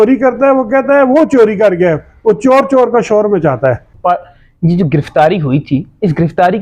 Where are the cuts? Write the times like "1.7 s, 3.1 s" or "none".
3.9 s